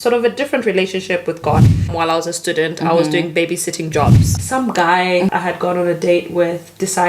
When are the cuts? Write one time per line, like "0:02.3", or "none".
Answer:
0:01.9
0:04.2